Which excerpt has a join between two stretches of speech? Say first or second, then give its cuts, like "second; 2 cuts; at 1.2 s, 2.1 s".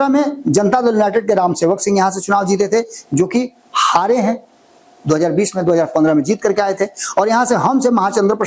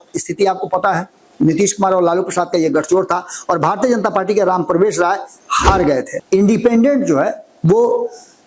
second; 1 cut; at 6.1 s